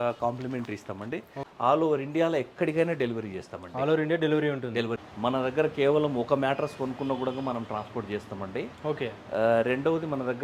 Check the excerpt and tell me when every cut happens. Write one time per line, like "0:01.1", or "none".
0:01.4
0:05.0

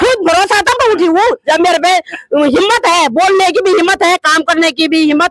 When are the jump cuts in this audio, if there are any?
none

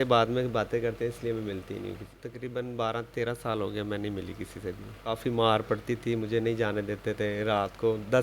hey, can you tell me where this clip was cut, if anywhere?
0:02.1
0:05.1

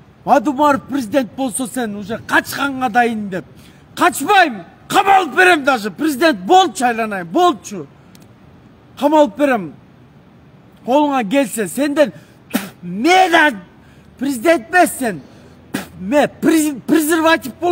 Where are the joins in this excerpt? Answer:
none

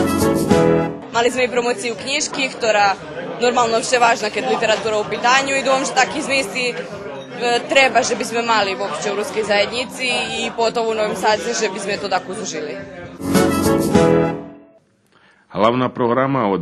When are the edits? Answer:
0:01.1

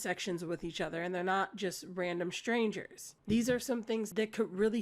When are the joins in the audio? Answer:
none

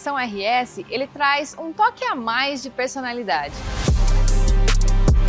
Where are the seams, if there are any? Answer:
0:03.6

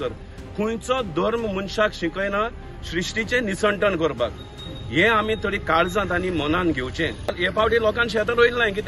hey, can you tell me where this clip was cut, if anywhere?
0:07.5

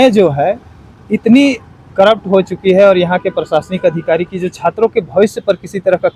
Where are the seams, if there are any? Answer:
none

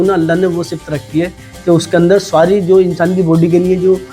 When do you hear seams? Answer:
none

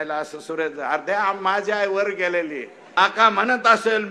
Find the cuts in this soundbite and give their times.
0:02.7

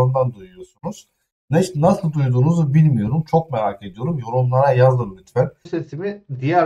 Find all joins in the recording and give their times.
0:05.6

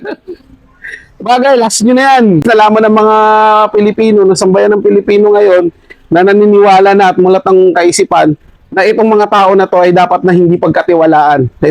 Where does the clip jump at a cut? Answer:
0:02.4

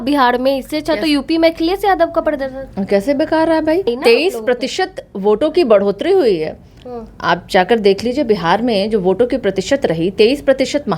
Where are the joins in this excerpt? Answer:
0:03.9

